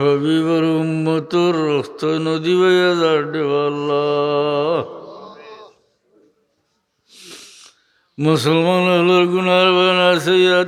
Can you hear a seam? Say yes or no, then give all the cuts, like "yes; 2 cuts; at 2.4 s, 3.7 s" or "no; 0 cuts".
no; 0 cuts